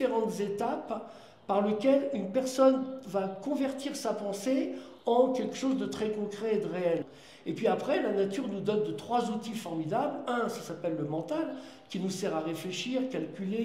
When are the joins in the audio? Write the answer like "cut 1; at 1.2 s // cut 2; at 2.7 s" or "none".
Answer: none